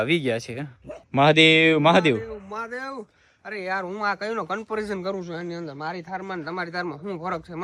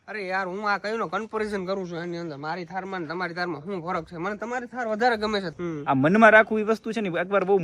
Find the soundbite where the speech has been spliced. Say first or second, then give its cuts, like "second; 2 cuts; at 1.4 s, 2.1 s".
second; 1 cut; at 5.5 s